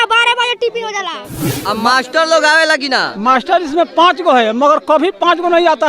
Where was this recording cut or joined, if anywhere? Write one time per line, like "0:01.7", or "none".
0:01.4

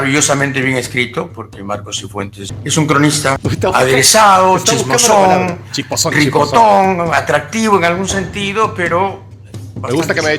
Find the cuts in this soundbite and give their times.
0:02.5
0:03.4

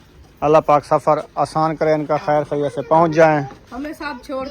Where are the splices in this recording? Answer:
0:03.6

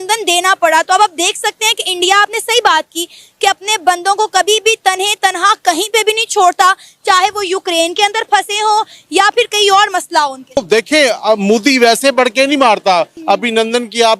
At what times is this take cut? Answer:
0:10.6
0:13.1

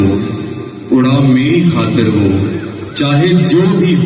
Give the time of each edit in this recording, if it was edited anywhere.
none

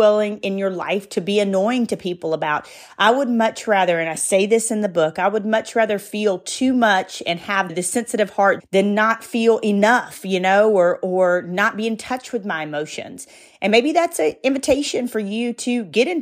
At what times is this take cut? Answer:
none

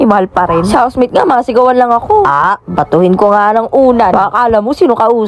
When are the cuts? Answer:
none

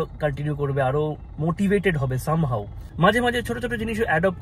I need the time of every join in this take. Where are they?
0:02.8

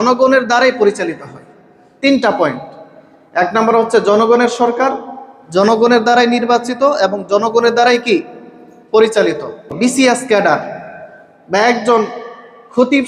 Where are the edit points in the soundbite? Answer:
0:09.7

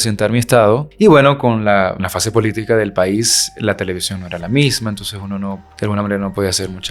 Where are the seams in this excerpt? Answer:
0:00.9
0:02.1
0:05.7

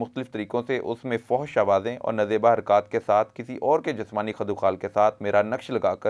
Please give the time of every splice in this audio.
none

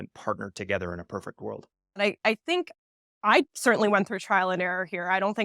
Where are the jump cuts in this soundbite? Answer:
0:02.0

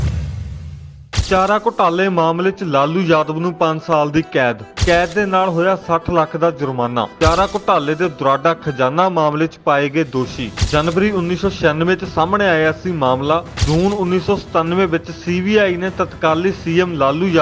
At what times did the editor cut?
0:00.9

